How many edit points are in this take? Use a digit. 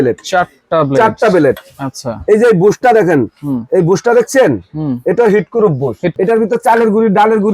1